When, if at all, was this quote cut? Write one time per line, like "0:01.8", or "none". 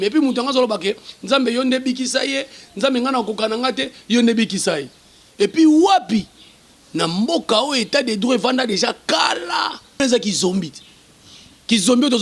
0:10.0